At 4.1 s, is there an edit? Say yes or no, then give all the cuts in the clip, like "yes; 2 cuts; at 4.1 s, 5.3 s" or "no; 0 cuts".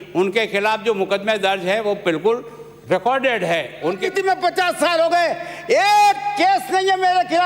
yes; 1 cut; at 4.1 s